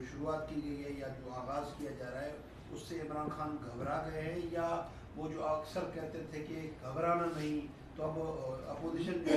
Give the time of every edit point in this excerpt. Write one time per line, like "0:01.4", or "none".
0:07.0